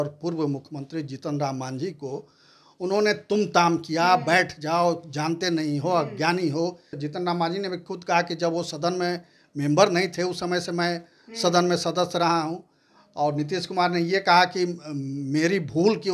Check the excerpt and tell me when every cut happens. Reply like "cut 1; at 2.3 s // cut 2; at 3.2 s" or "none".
cut 1; at 7.0 s